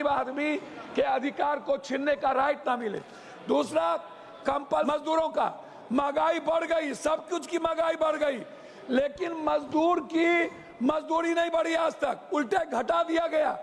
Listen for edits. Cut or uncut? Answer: cut